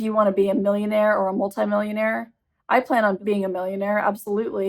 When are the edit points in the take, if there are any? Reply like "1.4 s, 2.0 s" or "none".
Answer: 3.2 s